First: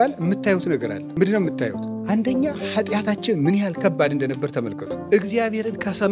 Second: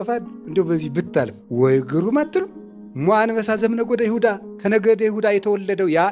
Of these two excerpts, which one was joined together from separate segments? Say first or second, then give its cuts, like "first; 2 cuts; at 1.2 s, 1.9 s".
first; 3 cuts; at 1.0 s, 1.9 s, 5.0 s